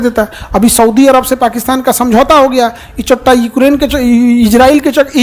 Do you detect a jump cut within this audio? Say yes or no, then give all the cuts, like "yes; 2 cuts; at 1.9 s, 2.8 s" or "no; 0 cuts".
no; 0 cuts